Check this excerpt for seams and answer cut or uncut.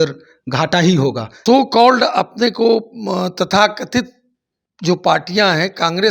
cut